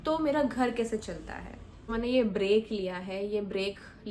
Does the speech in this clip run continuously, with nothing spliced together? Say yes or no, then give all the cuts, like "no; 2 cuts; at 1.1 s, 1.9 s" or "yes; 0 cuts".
no; 1 cut; at 1.9 s